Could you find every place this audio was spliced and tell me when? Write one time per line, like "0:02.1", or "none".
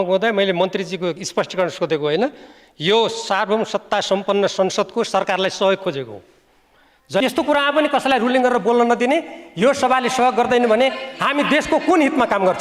0:07.2